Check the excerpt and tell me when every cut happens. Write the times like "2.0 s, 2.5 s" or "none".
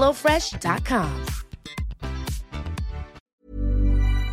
3.3 s